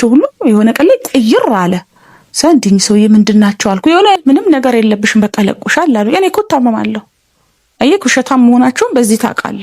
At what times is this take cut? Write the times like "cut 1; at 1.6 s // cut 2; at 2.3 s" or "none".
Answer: cut 1; at 4.2 s